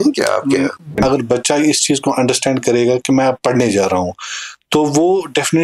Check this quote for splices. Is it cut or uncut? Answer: cut